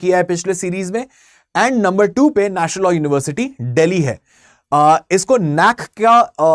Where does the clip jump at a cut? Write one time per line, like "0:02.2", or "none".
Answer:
none